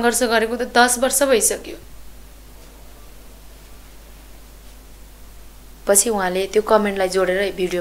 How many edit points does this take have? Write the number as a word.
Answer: two